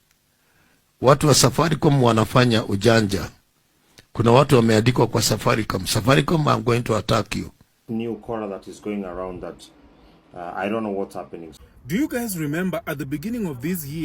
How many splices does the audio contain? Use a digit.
2